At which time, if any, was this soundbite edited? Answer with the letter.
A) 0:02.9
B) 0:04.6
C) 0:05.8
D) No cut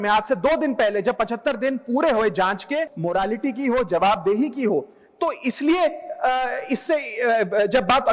A